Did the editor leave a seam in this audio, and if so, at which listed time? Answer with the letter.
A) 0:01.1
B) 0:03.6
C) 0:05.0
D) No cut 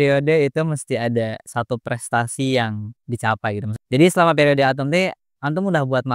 B